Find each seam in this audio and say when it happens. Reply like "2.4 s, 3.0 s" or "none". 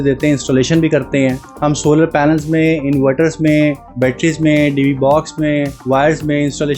1.5 s, 3.8 s, 5.8 s